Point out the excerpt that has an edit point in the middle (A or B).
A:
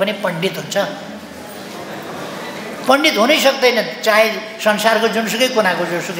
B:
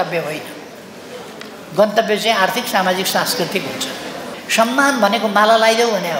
B